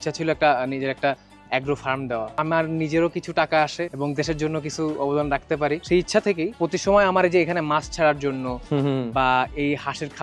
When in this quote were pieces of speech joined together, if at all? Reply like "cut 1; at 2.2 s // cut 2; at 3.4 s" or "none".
none